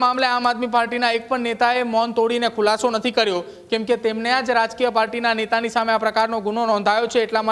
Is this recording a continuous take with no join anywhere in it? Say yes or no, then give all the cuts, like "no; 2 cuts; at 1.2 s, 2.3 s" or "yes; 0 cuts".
yes; 0 cuts